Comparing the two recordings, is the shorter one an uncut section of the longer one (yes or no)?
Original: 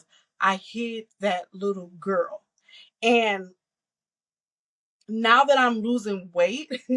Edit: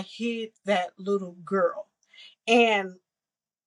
yes